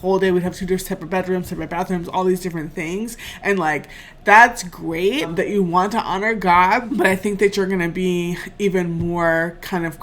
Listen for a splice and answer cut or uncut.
cut